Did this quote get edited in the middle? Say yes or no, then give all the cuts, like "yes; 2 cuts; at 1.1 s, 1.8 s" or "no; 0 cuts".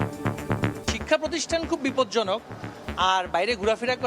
yes; 1 cut; at 0.9 s